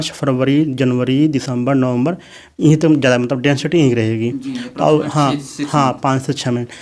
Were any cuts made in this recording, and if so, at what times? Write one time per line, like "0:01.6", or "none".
none